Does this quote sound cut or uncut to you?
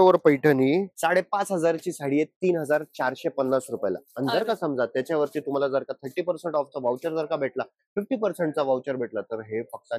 cut